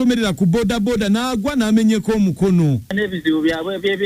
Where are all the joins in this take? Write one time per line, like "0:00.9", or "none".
0:02.9